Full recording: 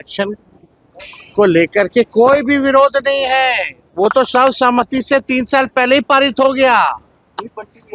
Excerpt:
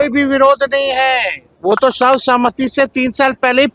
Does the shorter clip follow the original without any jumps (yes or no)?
yes